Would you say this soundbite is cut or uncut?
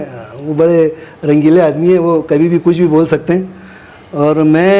uncut